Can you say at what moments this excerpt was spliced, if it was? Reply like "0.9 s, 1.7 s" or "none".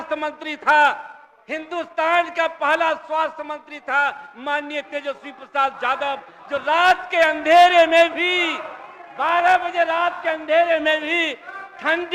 none